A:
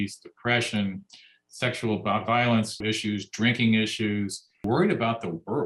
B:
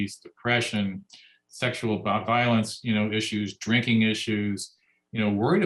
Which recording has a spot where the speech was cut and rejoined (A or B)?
A